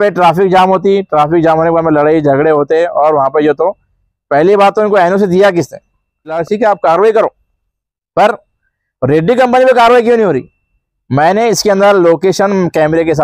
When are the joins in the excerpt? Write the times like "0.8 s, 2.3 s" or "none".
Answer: 6.4 s